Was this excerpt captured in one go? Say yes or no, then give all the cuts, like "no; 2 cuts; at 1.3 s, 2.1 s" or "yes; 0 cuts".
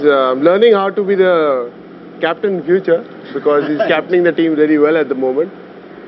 yes; 0 cuts